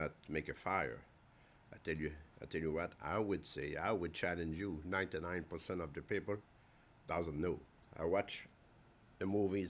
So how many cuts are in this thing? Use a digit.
0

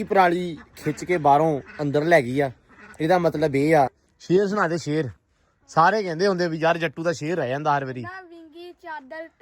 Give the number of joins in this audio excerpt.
1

